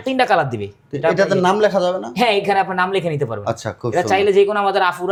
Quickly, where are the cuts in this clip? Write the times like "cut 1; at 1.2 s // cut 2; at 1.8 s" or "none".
none